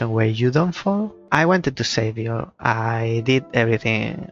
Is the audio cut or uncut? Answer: cut